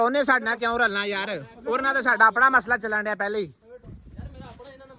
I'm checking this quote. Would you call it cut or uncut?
uncut